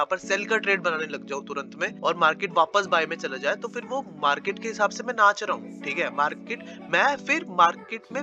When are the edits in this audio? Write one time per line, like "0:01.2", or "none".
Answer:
0:01.9